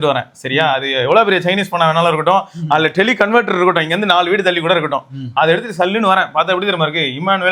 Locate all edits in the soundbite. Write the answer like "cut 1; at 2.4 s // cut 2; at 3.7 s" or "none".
none

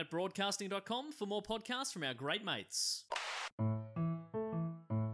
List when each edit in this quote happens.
cut 1; at 3.6 s

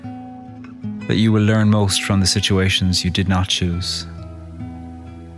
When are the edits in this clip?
cut 1; at 0.9 s

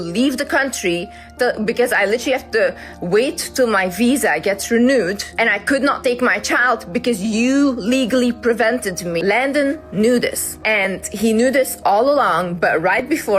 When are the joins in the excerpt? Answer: cut 1; at 5.2 s // cut 2; at 9.2 s // cut 3; at 10.5 s

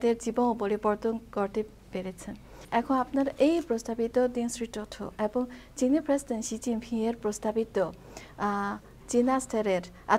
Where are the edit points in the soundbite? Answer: cut 1; at 2.6 s

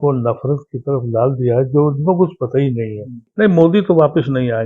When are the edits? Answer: cut 1; at 3.2 s

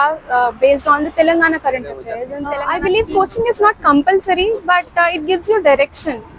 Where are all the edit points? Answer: cut 1; at 2.5 s

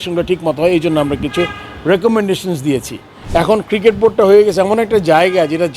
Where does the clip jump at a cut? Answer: cut 1; at 3.1 s

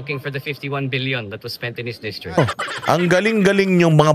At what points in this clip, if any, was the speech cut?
cut 1; at 2.4 s

